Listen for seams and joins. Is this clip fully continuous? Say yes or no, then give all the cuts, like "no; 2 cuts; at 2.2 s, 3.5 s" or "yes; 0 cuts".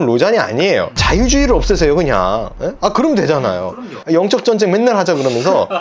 no; 2 cuts; at 1.0 s, 4.0 s